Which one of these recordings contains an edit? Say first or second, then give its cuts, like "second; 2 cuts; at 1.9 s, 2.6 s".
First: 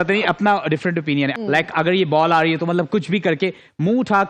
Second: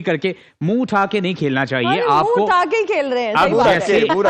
first; 1 cut; at 1.3 s